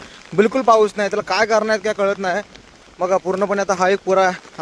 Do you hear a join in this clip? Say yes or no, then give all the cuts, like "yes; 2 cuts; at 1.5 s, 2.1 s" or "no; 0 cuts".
no; 0 cuts